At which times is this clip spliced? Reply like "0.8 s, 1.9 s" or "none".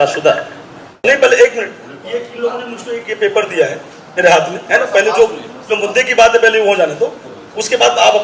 1.0 s